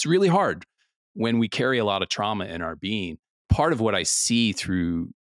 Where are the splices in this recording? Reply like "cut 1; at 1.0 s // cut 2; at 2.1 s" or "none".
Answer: cut 1; at 3.5 s